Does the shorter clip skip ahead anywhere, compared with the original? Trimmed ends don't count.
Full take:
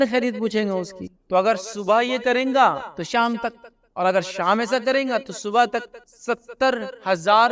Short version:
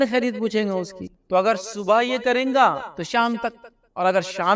no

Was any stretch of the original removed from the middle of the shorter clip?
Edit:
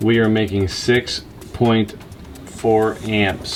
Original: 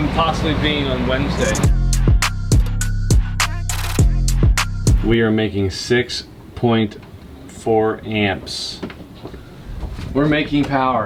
no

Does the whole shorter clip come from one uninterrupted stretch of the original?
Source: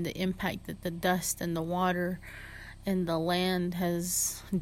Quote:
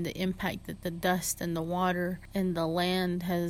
no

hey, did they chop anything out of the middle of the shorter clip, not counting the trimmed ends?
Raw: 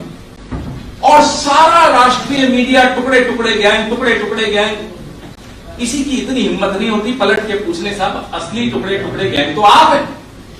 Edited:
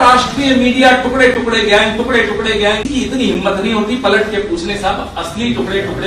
yes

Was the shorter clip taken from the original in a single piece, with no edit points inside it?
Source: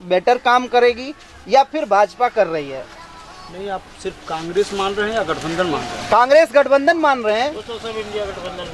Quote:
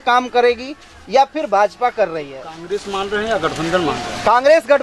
no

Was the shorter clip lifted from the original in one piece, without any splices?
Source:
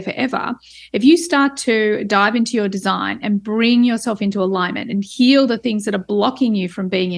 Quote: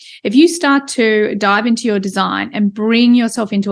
yes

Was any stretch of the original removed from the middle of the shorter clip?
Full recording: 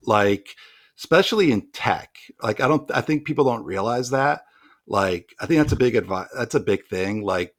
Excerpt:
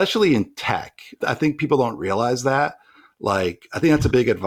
yes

